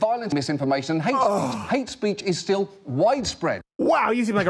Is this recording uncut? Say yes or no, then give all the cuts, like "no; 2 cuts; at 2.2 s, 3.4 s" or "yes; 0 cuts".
yes; 0 cuts